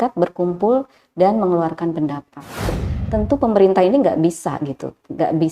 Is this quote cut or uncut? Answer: cut